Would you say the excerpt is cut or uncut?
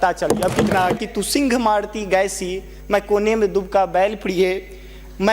cut